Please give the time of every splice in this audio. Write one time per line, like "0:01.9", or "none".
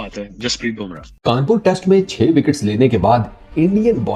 0:01.1